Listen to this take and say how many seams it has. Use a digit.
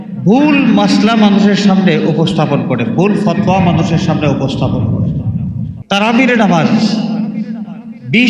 1